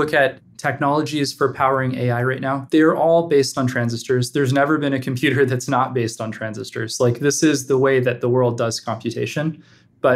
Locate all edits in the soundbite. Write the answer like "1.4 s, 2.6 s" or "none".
none